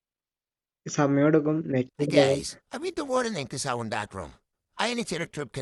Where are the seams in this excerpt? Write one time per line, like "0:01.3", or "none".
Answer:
none